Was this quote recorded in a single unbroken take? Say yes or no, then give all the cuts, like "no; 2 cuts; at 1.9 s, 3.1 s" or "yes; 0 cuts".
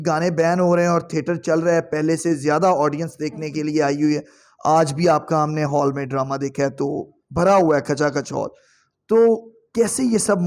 yes; 0 cuts